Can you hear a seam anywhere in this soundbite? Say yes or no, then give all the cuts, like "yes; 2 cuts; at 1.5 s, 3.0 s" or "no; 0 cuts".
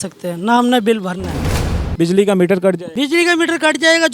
yes; 2 cuts; at 1.7 s, 2.9 s